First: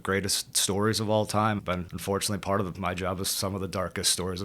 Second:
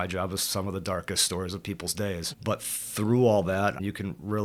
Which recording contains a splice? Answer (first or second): first